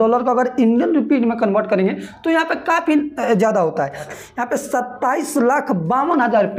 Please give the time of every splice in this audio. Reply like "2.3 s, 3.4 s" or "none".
4.1 s